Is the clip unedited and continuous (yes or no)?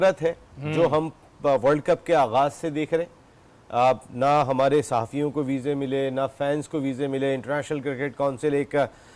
yes